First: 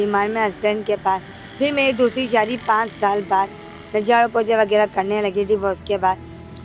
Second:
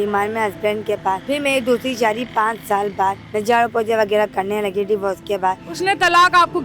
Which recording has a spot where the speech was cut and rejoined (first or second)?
second